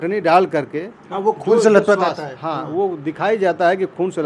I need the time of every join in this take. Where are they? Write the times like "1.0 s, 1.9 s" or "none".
none